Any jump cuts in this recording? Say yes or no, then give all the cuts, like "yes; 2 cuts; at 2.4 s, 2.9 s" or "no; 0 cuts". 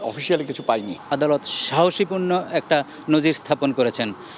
yes; 1 cut; at 1.0 s